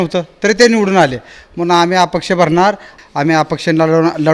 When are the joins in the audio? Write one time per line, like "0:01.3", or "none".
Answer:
0:02.9